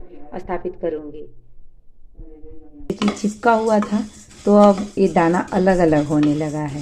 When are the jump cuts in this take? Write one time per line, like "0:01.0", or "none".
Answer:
0:02.9